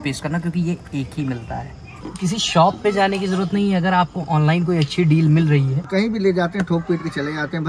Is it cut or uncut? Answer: cut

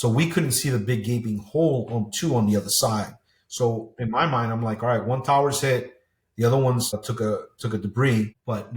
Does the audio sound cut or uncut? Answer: uncut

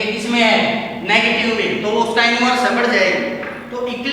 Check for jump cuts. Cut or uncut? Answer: uncut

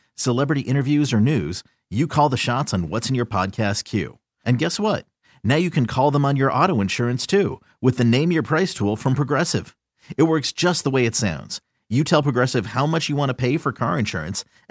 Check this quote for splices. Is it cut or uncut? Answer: uncut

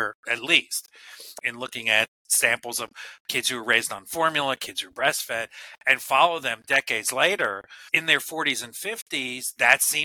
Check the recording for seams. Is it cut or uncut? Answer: cut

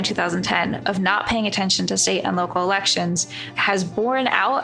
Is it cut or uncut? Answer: uncut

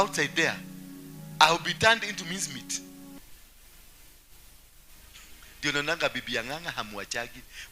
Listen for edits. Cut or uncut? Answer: cut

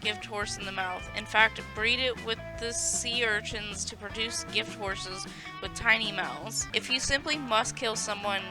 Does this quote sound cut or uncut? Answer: cut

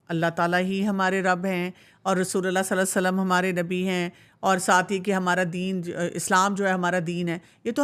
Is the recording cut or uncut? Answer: uncut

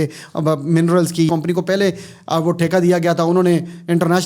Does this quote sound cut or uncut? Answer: cut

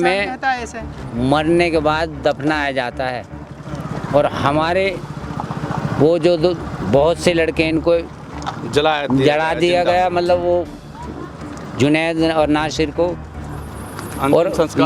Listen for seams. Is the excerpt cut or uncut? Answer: uncut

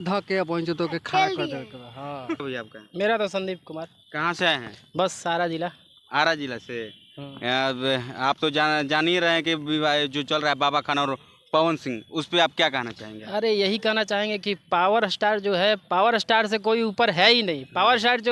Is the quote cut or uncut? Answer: cut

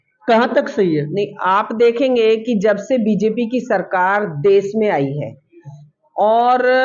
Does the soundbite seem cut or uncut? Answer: uncut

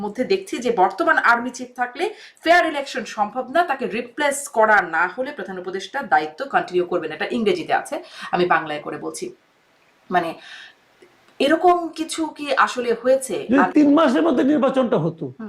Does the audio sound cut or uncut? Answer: cut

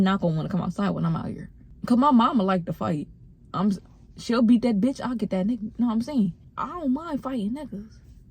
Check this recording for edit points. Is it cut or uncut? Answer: cut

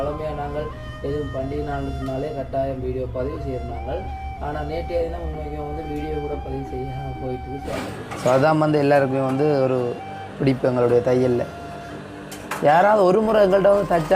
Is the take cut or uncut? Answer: cut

